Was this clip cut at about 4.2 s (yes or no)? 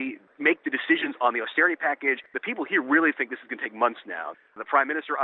yes